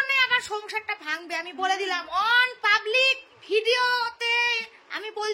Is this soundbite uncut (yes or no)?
yes